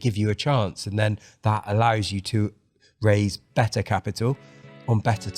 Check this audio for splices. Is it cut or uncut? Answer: uncut